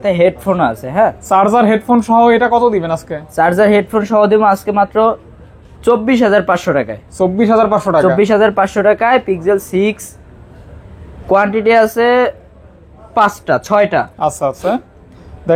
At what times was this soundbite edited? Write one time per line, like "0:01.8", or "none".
none